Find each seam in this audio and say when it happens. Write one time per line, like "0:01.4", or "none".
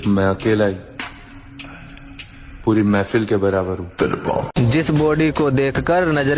0:04.5